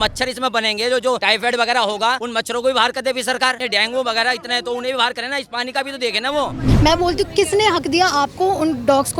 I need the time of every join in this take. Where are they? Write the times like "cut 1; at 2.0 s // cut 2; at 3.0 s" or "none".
cut 1; at 1.2 s // cut 2; at 2.2 s // cut 3; at 3.6 s // cut 4; at 6.6 s